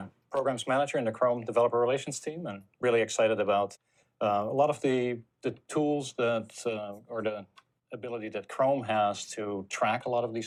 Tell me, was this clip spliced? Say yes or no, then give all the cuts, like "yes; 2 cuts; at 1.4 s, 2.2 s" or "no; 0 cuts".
no; 0 cuts